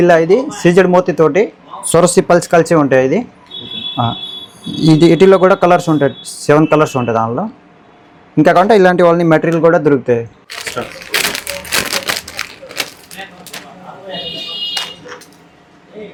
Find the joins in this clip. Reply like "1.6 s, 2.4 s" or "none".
none